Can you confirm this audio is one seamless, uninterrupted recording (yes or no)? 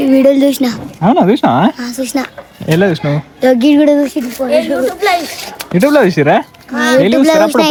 yes